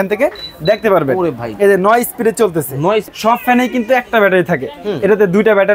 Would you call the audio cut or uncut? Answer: cut